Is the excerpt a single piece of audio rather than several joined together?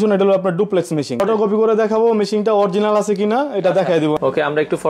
no; 2 cuts; at 1.2 s, 4.2 s

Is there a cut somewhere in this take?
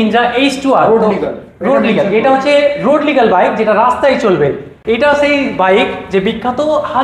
no; 0 cuts

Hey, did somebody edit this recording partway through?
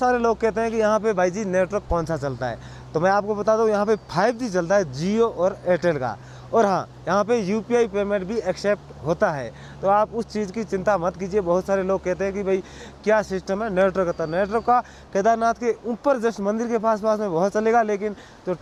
no; 0 cuts

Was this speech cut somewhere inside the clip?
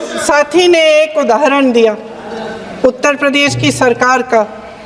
no; 0 cuts

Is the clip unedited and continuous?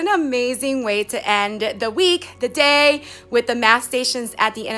yes; 0 cuts

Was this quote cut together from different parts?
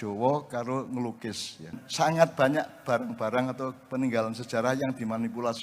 yes; 1 cut; at 1.8 s

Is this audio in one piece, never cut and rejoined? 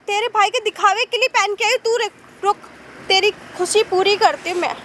yes; 0 cuts

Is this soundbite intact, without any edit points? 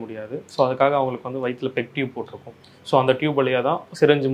yes; 0 cuts

